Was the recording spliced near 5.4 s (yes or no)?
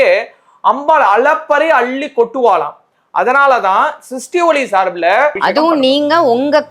yes